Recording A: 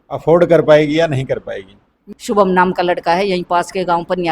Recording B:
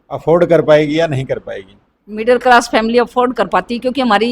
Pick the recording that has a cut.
A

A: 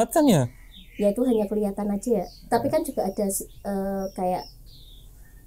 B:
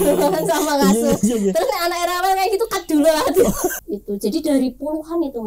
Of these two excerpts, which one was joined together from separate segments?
B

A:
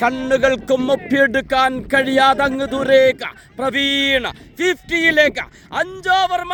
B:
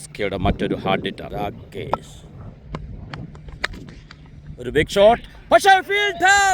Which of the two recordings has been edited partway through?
B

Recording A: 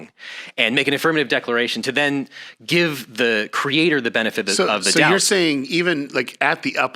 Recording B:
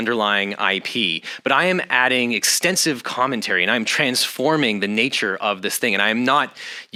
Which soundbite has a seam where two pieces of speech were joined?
A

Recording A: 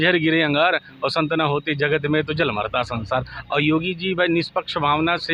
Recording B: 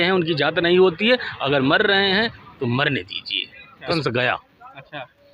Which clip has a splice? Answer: B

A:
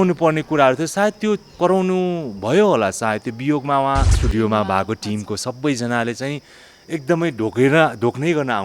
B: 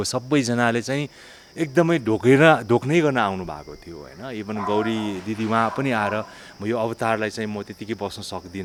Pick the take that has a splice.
A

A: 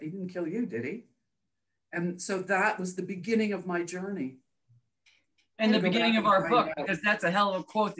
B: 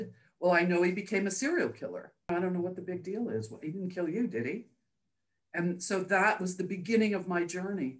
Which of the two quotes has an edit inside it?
B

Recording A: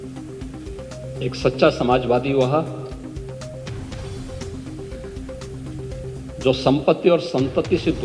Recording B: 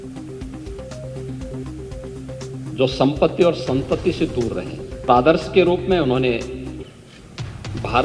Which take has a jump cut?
B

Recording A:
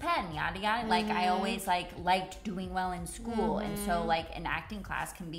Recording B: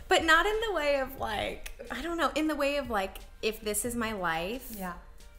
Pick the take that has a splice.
B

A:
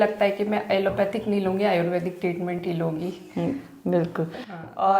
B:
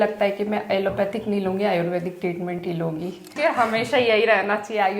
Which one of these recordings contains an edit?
B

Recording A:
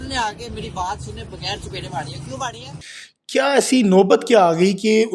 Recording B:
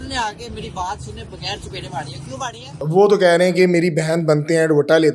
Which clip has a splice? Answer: B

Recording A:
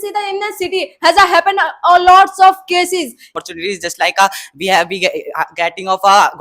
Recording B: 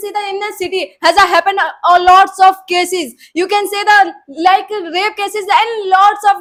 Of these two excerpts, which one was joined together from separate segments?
A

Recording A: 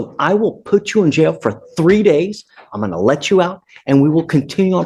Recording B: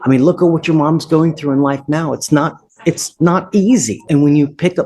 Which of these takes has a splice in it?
B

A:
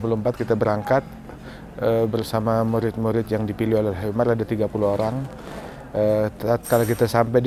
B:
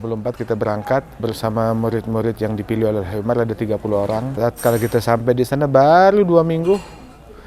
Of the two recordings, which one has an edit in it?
B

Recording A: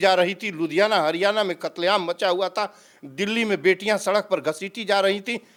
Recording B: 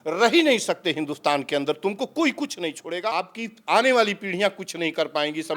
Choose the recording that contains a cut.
B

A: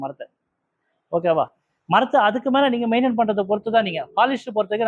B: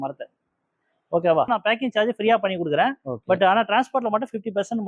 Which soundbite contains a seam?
B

